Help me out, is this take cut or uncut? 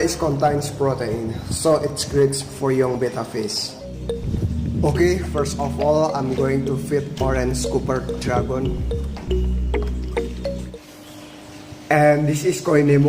cut